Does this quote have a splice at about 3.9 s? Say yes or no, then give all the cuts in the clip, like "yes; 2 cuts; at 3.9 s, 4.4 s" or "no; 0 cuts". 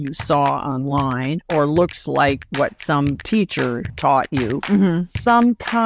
yes; 2 cuts; at 3.9 s, 4.6 s